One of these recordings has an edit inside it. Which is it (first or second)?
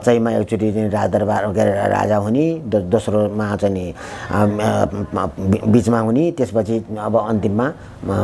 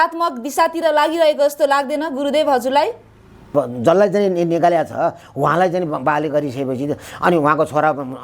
second